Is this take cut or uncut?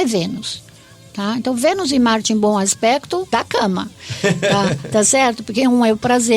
cut